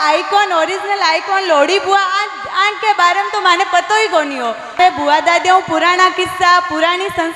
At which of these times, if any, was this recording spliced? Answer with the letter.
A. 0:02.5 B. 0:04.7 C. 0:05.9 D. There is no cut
B